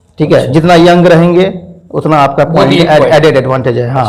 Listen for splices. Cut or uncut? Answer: uncut